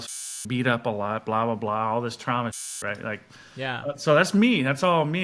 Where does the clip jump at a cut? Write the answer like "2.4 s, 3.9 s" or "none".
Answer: none